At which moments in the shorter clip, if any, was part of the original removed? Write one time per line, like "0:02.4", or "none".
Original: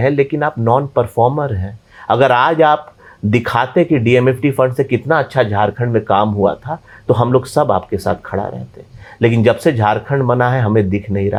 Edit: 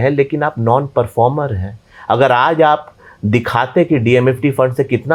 none